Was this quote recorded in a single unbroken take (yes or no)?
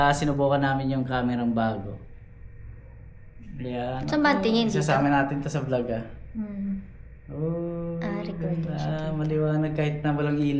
yes